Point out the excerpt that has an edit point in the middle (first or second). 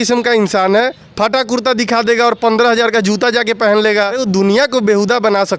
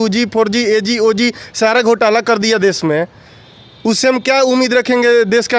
first